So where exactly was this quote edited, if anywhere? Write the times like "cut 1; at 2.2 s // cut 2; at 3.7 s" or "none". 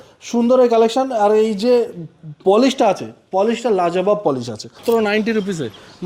cut 1; at 4.8 s